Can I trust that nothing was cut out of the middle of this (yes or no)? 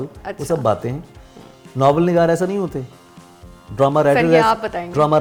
yes